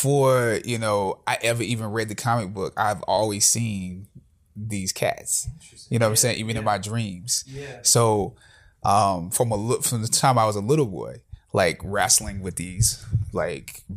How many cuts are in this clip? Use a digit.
0